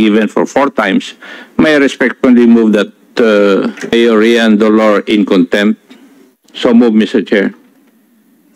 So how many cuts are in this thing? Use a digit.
1